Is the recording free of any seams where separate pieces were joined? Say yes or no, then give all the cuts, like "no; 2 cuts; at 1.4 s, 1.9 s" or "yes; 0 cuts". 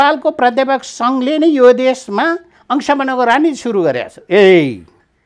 yes; 0 cuts